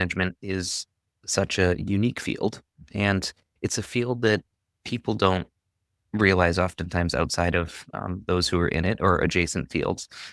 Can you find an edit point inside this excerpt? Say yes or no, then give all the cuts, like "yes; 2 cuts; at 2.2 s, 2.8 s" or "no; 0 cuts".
no; 0 cuts